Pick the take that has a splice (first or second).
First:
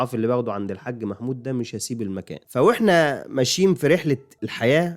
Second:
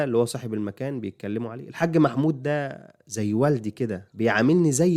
first